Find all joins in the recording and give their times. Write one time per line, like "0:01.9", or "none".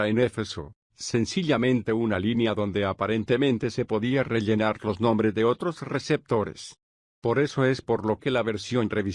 0:02.0